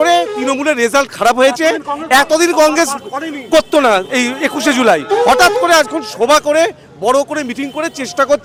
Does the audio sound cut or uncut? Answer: uncut